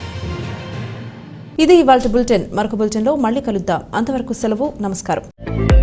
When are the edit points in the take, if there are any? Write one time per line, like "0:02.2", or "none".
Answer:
none